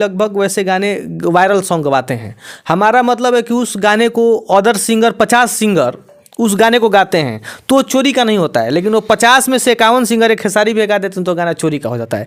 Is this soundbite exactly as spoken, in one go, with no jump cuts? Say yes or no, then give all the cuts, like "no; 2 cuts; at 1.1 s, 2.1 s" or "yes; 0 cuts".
yes; 0 cuts